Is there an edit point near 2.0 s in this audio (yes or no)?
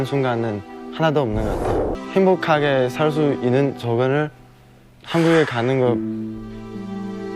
yes